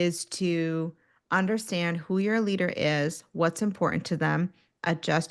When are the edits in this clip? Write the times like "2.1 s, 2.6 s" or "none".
none